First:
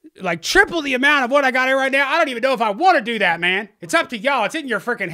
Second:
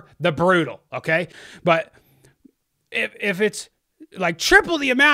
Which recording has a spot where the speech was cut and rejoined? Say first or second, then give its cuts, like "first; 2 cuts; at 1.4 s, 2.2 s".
second; 1 cut; at 1.4 s